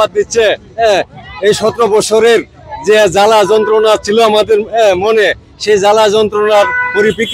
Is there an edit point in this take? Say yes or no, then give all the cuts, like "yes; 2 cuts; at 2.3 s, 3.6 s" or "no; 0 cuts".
no; 0 cuts